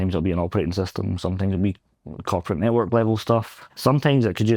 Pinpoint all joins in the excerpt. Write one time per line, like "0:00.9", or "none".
0:03.6